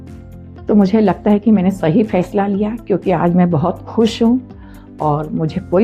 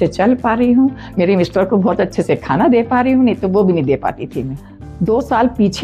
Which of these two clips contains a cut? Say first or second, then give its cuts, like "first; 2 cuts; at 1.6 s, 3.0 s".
second; 1 cut; at 4.6 s